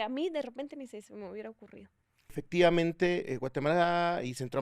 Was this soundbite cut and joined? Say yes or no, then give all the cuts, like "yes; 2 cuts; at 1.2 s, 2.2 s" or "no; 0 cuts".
yes; 1 cut; at 2.4 s